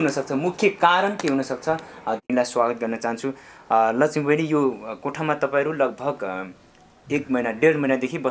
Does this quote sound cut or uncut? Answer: uncut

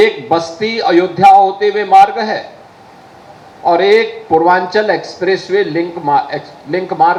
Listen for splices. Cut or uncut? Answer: uncut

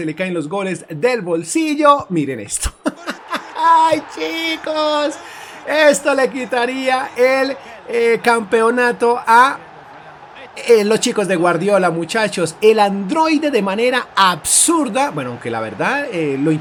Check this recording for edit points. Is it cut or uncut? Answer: uncut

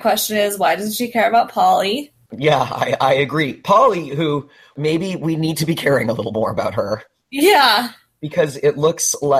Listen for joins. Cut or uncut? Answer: cut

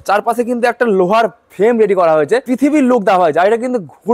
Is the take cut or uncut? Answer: cut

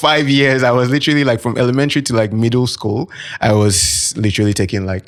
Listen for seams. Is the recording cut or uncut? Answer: uncut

